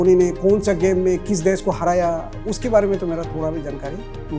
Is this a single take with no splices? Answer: yes; 0 cuts

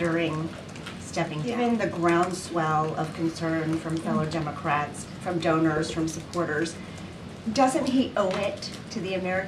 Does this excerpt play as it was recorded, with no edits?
no; 1 cut; at 1.5 s

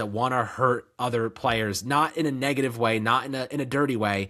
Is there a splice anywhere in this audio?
no; 0 cuts

